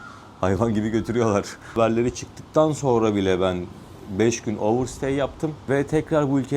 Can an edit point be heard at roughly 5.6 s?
yes; 2 cuts; at 1.8 s, 5.6 s

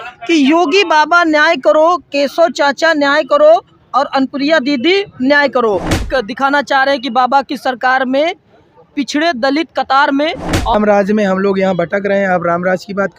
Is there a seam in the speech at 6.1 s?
yes; 2 cuts; at 6.1 s, 10.7 s

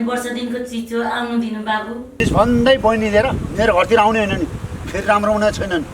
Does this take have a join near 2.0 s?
yes; 1 cut; at 2.0 s

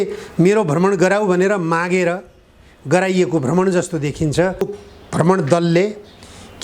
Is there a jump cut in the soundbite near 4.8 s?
yes; 1 cut; at 4.8 s

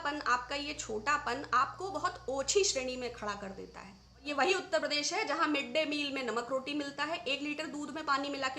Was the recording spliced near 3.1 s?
no; 1 cut; at 4.3 s

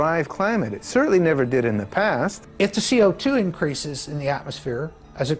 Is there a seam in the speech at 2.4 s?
yes; 1 cut; at 2.4 s

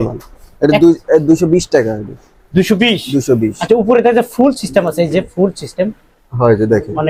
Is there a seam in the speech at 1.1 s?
no; 0 cuts

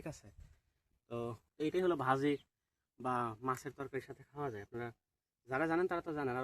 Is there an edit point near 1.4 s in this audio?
yes; 1 cut; at 1.4 s

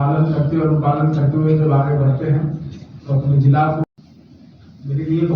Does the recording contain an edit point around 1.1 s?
no; 1 cut; at 3.8 s

